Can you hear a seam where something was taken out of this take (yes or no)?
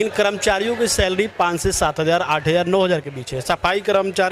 no